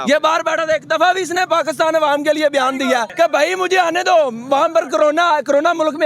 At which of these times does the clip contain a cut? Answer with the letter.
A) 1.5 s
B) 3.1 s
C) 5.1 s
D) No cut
B